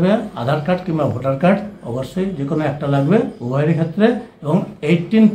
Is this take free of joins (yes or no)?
yes